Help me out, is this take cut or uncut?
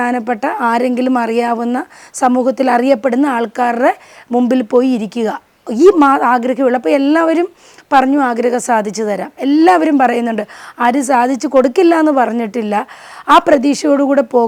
uncut